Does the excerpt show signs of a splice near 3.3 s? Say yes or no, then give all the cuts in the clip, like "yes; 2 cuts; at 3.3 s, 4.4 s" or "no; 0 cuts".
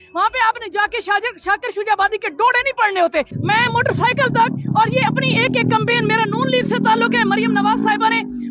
yes; 1 cut; at 3.3 s